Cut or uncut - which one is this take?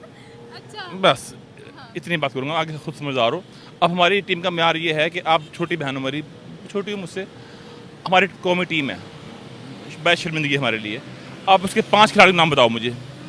uncut